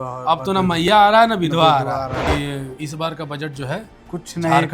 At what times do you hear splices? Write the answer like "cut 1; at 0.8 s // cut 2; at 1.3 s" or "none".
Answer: cut 1; at 2.3 s